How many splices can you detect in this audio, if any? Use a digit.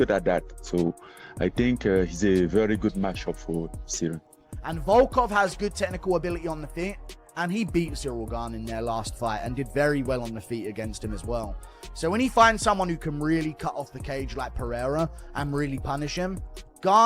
2